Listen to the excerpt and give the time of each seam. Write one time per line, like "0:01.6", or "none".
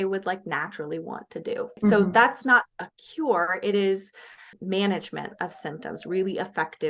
0:01.8
0:04.5